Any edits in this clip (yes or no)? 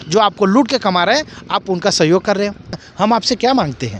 yes